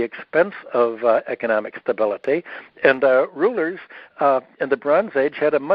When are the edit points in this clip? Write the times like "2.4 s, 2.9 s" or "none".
none